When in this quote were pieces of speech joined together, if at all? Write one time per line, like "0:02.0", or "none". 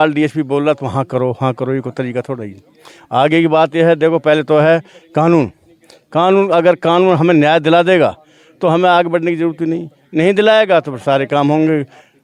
none